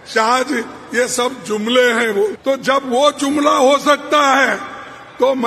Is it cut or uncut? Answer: cut